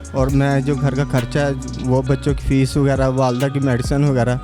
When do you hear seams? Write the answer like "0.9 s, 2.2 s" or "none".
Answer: none